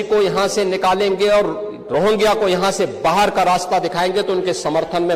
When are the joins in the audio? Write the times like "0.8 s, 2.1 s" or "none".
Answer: none